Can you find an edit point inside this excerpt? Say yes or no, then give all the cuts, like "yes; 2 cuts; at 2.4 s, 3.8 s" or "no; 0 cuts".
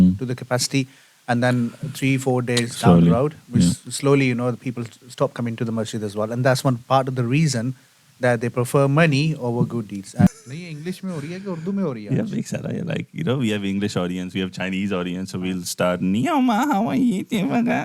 yes; 1 cut; at 10.3 s